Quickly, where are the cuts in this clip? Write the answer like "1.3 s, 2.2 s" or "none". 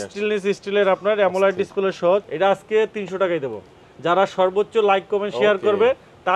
2.2 s